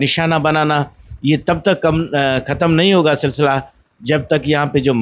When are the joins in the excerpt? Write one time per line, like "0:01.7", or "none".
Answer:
none

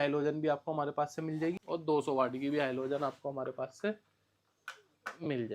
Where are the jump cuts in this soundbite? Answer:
0:01.6

